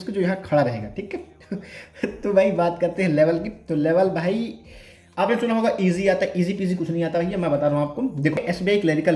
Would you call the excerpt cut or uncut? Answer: uncut